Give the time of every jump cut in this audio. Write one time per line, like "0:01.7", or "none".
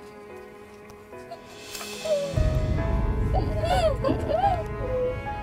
none

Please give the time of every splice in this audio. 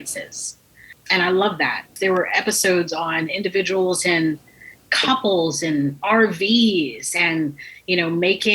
0:01.0
0:01.9

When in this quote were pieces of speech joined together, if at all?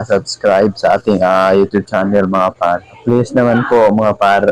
0:03.0

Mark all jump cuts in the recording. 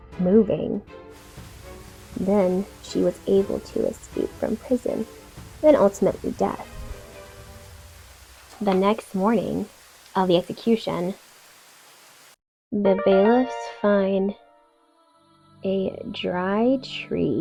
none

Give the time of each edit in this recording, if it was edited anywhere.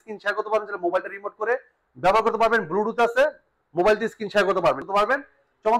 0:04.8

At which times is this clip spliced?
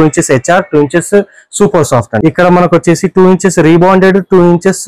0:02.1

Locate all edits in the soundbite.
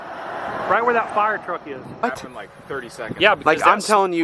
0:02.0

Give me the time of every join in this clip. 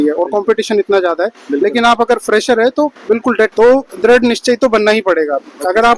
0:03.5

